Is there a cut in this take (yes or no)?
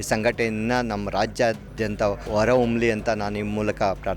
yes